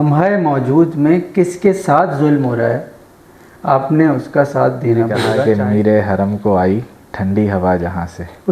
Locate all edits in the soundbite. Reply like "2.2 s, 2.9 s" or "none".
5.3 s